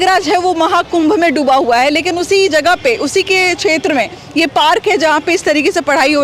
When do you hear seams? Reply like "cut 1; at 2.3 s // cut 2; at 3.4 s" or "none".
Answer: none